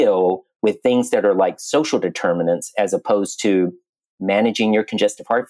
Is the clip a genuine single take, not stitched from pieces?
yes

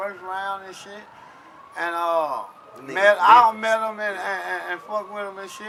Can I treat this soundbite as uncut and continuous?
yes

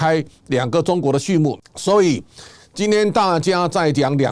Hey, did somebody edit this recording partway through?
yes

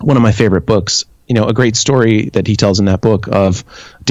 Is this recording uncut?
no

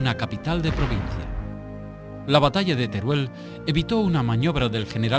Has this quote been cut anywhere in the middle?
no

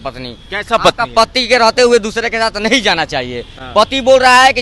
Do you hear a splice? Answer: no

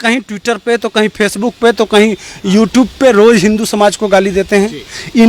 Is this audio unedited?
yes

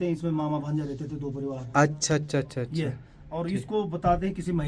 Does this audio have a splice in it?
no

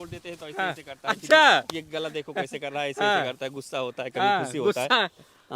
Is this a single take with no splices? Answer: yes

